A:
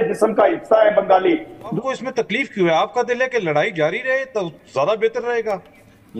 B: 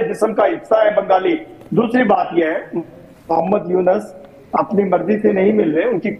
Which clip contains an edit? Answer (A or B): A